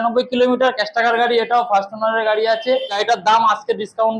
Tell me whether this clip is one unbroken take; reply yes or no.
no